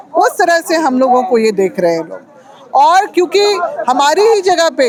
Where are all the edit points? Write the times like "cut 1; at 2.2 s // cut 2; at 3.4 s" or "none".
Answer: none